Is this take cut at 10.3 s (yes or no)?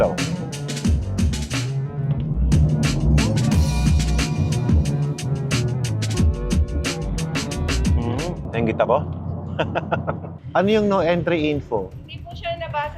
yes